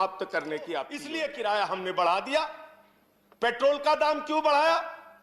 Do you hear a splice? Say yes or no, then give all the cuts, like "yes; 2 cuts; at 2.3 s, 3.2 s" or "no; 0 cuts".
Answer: yes; 1 cut; at 1.0 s